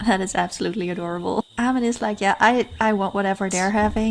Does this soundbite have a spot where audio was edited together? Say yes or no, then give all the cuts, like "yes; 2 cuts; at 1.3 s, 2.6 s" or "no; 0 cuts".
yes; 1 cut; at 1.5 s